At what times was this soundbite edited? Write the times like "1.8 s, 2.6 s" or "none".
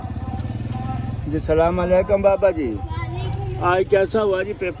none

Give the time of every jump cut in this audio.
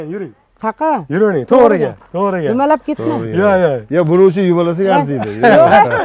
none

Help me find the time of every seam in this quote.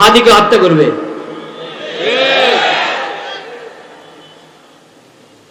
none

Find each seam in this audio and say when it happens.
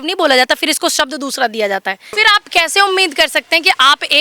2.2 s

